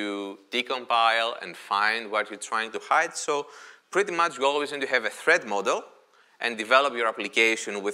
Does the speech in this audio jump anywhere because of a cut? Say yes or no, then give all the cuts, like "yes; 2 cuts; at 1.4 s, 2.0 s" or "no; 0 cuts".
no; 0 cuts